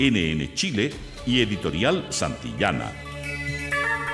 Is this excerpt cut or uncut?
cut